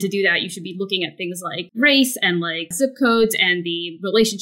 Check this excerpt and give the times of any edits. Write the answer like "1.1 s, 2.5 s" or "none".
1.7 s, 2.6 s